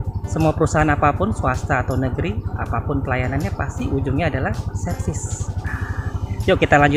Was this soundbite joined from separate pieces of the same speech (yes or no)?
no